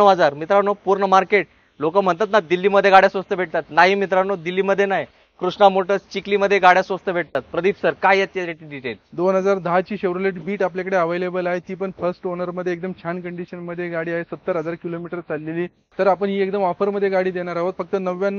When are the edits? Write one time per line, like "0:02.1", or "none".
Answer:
none